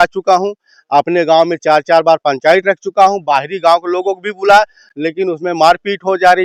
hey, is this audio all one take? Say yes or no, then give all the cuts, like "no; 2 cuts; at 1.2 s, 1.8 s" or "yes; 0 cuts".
yes; 0 cuts